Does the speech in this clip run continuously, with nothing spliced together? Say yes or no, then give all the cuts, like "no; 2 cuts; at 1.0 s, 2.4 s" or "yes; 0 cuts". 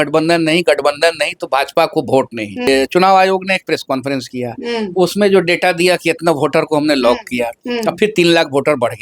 no; 1 cut; at 2.7 s